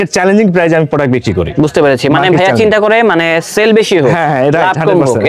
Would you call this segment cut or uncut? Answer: uncut